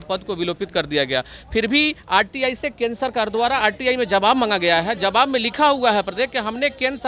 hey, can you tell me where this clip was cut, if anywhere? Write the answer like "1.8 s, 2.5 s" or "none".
none